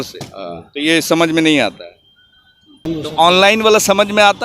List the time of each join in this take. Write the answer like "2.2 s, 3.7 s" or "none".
2.8 s